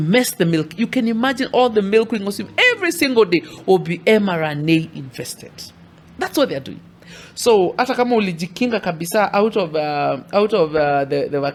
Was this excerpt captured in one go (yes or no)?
yes